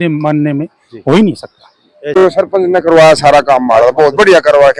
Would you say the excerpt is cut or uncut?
cut